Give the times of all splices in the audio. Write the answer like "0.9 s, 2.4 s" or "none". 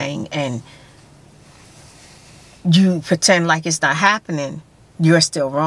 none